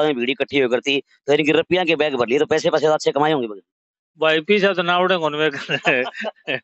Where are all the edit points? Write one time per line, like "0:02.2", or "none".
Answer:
none